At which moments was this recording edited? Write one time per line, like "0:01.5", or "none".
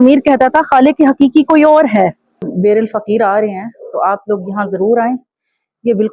0:02.5